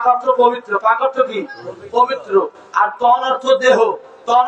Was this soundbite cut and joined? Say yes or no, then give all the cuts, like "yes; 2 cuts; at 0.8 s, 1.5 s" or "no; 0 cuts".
no; 0 cuts